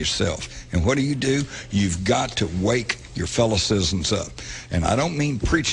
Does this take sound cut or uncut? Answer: cut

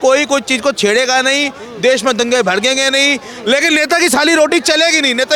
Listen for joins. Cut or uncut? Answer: uncut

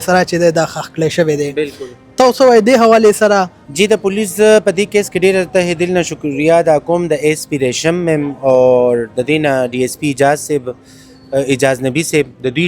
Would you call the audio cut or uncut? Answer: uncut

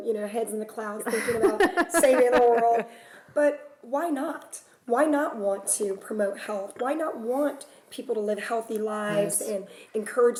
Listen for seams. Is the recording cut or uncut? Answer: uncut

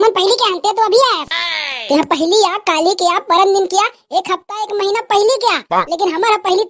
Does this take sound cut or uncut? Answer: uncut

